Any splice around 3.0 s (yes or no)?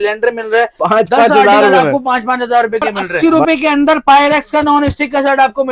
yes